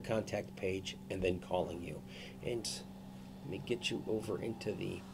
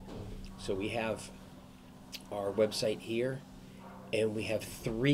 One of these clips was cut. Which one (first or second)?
first